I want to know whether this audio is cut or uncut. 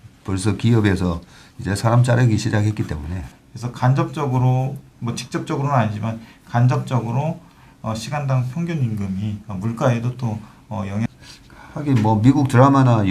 cut